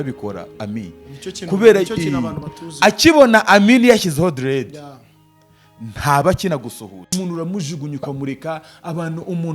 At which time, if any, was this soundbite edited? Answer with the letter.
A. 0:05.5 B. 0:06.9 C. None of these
B